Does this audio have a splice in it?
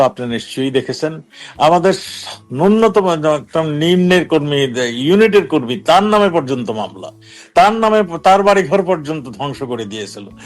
no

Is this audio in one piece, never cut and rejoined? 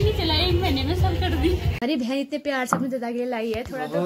no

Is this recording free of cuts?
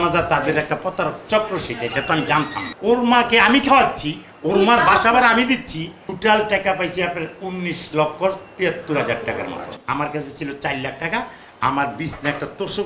no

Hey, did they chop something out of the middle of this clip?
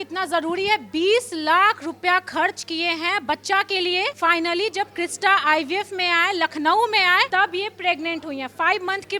yes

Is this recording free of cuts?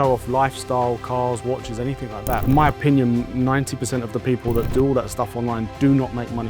no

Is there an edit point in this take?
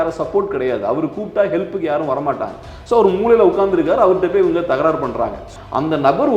yes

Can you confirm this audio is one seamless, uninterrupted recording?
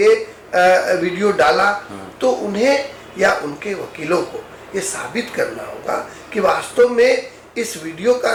yes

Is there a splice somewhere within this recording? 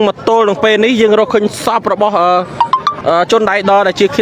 no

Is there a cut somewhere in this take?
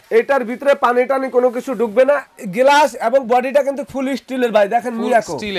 yes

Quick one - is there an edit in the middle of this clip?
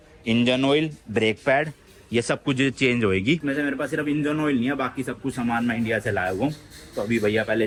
no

